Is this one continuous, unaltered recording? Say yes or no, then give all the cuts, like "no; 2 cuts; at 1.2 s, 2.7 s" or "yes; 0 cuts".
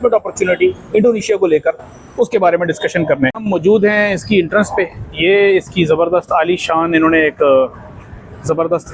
no; 1 cut; at 3.4 s